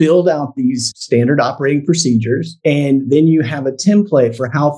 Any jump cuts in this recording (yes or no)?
yes